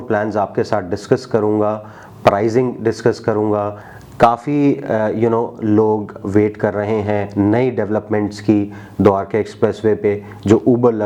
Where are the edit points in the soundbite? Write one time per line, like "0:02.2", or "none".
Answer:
0:03.8